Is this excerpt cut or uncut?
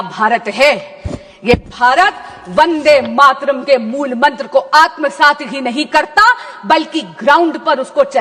uncut